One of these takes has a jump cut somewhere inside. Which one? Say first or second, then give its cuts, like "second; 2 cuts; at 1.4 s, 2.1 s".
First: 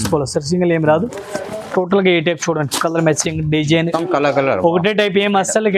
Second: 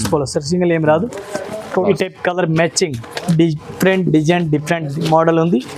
second; 1 cut; at 1.8 s